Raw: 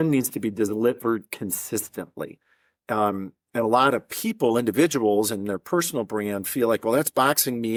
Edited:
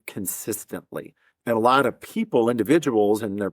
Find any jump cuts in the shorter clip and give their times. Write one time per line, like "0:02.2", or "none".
0:01.3